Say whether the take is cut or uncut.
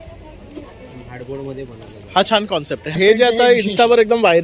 cut